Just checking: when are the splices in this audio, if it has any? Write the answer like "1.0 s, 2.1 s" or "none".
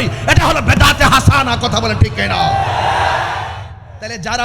3.5 s